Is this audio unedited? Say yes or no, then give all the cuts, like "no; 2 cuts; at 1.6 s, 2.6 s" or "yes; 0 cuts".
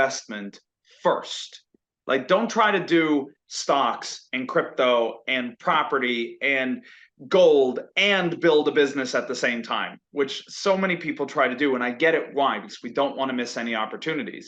yes; 0 cuts